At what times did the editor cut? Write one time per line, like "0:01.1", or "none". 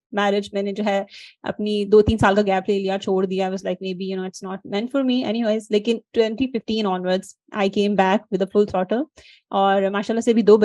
none